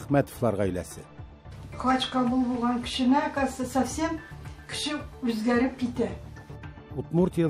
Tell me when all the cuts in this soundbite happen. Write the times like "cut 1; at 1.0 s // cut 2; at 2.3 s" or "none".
none